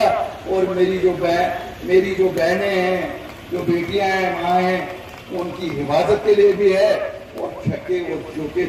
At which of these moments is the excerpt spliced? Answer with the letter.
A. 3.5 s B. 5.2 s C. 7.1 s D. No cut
D